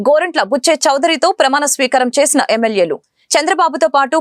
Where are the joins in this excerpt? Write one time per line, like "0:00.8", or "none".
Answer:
none